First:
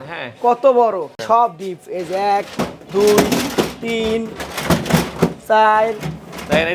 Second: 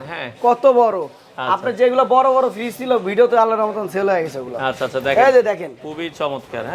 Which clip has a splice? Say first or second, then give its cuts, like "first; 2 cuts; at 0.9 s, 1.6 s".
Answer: first; 1 cut; at 1.2 s